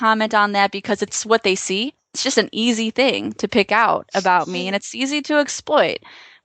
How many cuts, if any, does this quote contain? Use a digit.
2